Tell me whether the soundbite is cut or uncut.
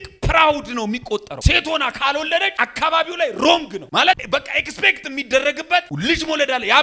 cut